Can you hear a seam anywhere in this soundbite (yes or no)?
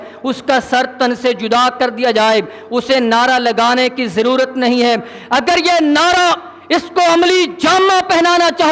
no